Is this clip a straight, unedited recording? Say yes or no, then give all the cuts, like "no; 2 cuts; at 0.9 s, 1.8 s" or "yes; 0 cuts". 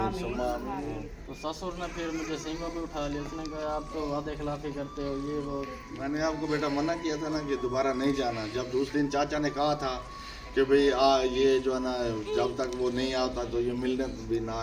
no; 2 cuts; at 0.8 s, 5.9 s